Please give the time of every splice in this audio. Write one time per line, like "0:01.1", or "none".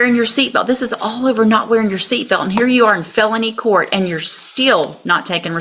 none